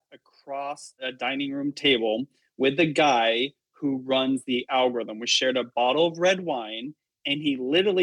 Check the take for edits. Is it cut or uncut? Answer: cut